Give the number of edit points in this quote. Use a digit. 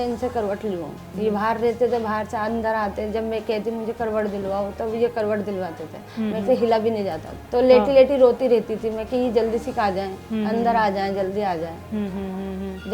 2